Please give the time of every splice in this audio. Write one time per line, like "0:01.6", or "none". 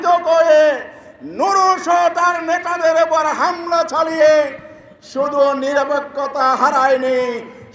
none